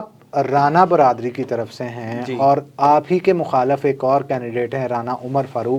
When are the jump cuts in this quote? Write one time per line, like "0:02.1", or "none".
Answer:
none